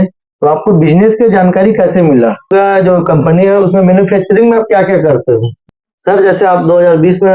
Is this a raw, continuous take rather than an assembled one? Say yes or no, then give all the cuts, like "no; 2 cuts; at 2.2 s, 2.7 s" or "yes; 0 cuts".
no; 2 cuts; at 2.4 s, 5.6 s